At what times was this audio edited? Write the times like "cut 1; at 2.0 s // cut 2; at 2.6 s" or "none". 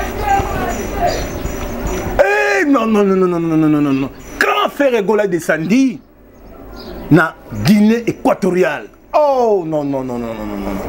none